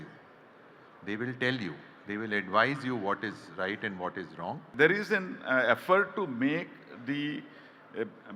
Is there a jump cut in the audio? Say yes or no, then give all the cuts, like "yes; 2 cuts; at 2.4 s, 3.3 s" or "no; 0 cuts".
yes; 1 cut; at 4.7 s